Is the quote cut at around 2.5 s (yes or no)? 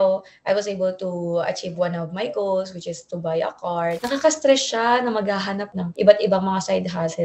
no